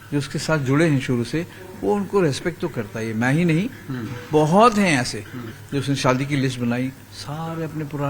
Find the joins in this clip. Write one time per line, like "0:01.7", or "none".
0:05.6